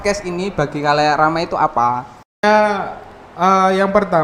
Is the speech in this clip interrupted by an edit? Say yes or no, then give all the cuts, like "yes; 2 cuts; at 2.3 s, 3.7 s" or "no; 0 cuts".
no; 0 cuts